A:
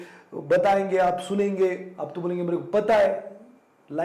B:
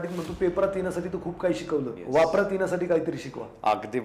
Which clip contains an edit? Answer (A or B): B